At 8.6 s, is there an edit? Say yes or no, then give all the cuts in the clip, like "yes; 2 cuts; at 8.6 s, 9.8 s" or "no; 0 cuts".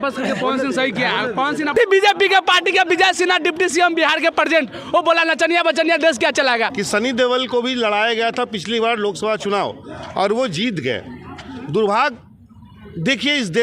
no; 2 cuts; at 1.7 s, 6.8 s